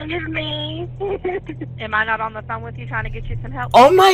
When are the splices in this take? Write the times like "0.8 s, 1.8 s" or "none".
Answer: none